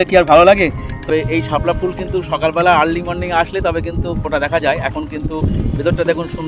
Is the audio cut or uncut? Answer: cut